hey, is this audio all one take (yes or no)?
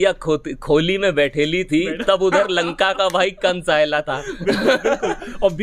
yes